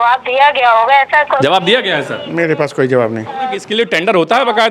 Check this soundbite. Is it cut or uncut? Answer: cut